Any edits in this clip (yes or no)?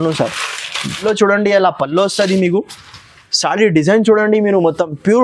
yes